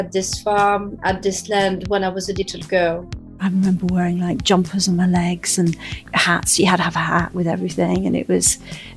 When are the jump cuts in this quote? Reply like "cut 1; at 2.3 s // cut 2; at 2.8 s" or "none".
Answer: cut 1; at 3.4 s